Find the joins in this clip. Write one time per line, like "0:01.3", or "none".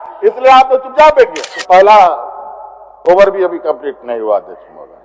0:01.5

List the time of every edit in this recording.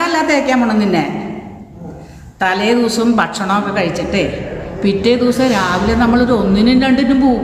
none

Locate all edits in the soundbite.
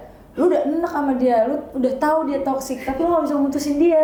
none

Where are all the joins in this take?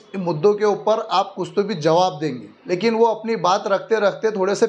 0:02.5

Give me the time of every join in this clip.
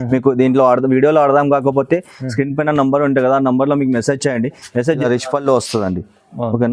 0:05.0

